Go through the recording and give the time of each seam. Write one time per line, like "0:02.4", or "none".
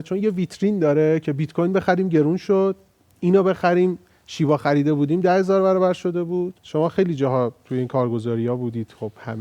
0:06.6